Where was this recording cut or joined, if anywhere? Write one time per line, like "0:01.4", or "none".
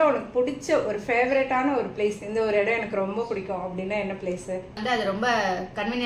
0:04.8